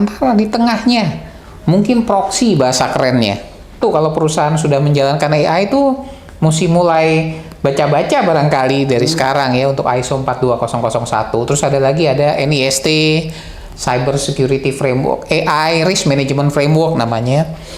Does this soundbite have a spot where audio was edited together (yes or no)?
yes